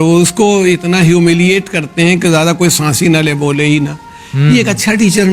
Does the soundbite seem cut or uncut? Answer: uncut